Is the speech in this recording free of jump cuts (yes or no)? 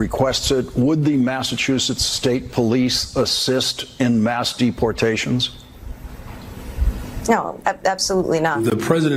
yes